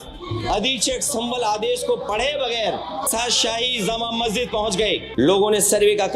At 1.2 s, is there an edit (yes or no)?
no